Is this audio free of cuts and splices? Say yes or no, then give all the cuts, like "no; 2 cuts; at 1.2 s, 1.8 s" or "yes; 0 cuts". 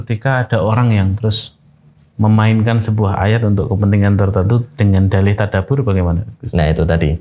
yes; 0 cuts